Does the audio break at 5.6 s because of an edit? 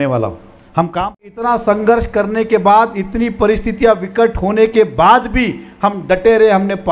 no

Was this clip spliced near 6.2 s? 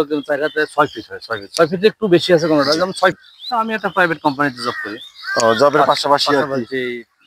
no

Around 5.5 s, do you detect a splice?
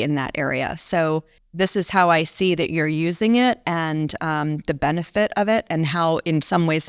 no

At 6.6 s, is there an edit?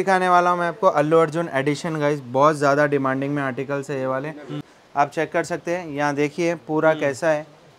no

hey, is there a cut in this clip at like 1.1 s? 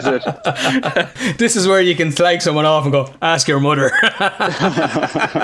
yes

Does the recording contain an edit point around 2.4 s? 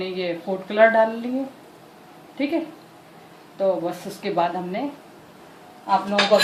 no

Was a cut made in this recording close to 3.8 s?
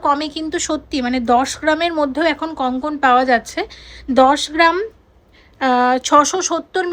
no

